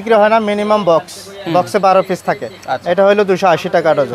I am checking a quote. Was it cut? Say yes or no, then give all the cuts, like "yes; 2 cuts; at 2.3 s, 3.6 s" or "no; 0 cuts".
no; 0 cuts